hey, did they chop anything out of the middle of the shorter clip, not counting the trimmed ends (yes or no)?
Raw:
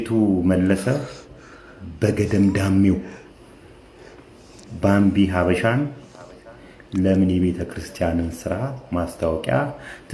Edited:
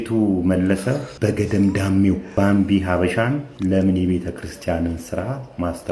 yes